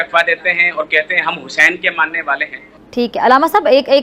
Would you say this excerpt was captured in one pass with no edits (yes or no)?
no